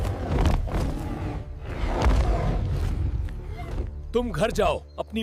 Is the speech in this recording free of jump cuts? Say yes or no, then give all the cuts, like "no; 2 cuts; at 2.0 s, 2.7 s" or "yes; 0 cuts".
no; 1 cut; at 1.4 s